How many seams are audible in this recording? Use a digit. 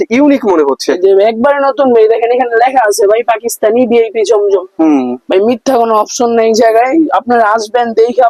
0